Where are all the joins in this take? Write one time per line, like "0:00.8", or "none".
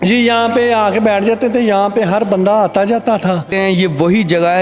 0:03.5